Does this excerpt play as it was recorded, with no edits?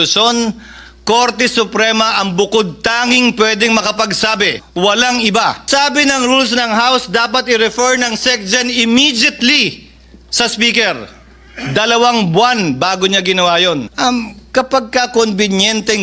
no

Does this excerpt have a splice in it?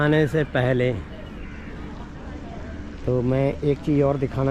no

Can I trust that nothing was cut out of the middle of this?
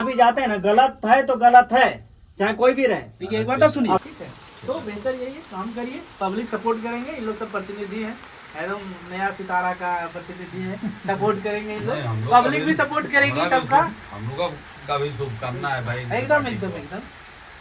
no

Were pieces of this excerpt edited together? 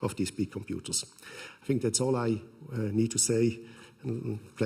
yes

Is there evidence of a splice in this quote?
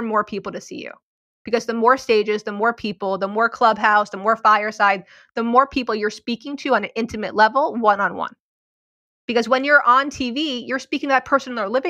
no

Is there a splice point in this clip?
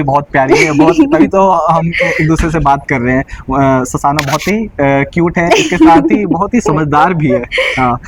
no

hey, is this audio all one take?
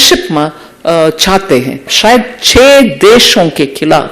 no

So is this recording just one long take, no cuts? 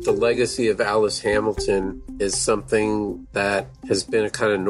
no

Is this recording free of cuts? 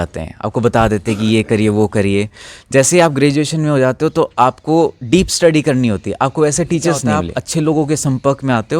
no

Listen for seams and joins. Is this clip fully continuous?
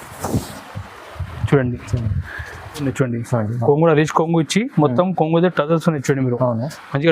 no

